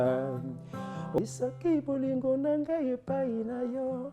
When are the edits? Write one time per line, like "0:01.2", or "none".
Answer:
0:01.2